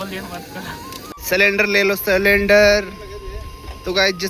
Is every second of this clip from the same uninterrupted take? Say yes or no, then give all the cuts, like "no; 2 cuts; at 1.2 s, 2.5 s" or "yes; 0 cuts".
no; 1 cut; at 0.9 s